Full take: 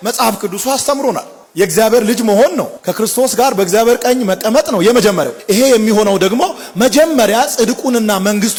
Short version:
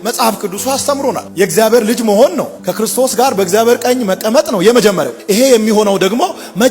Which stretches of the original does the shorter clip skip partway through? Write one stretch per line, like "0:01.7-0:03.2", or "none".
0:01.3-0:01.5